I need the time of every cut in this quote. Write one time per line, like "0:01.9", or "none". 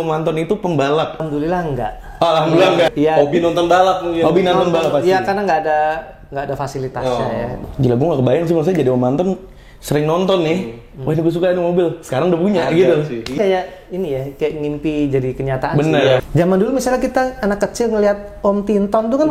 0:01.2
0:02.9
0:07.6
0:13.3
0:16.2

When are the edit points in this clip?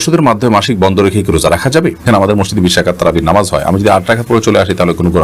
0:02.1

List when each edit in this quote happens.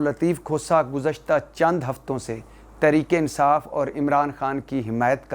none

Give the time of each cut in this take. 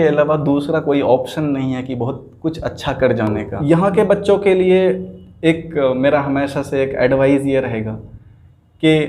0:03.5

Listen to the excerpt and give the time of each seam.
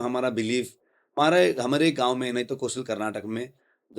0:01.0

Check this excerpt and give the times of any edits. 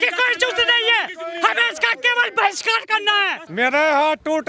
0:03.4

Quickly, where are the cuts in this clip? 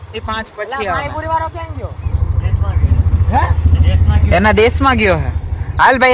none

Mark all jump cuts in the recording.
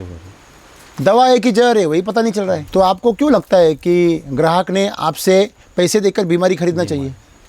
0:02.6

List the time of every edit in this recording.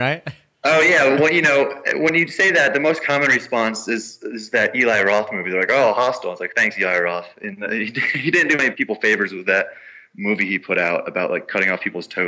0:08.7

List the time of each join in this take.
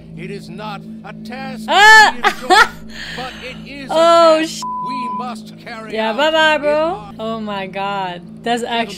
0:07.1

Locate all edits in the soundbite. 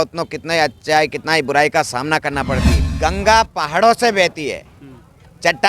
0:02.9

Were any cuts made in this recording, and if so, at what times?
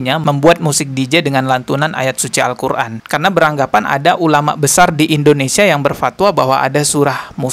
0:03.0

